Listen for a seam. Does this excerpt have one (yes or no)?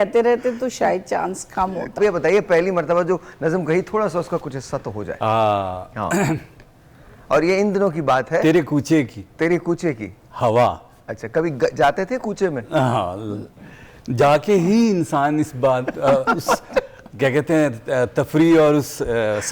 yes